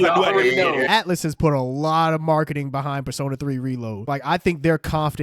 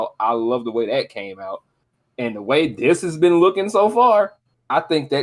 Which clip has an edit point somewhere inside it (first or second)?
first